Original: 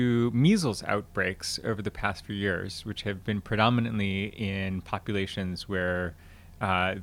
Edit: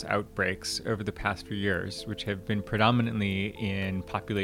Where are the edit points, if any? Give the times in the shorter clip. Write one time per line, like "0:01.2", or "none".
none